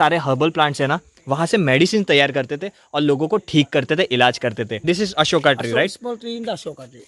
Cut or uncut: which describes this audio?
cut